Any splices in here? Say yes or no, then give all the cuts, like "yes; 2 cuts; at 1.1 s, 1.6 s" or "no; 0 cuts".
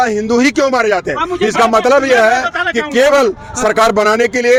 no; 0 cuts